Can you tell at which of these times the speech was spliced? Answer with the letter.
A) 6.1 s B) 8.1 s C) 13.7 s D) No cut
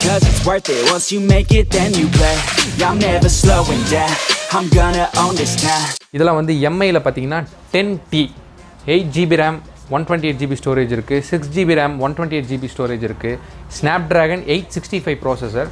A